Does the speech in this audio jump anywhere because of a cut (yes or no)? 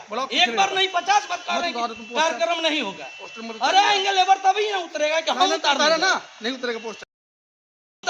no